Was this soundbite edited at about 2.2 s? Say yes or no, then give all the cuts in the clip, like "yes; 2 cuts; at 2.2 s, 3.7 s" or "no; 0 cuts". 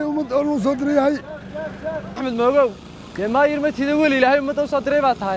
yes; 1 cut; at 2.2 s